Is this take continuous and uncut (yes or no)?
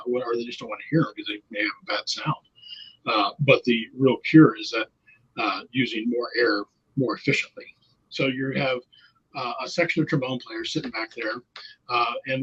no